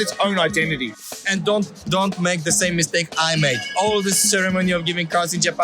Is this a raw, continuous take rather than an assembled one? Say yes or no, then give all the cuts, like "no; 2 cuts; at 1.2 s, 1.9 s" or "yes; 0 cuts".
no; 2 cuts; at 1.0 s, 3.7 s